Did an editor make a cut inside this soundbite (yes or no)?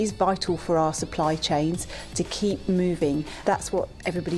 yes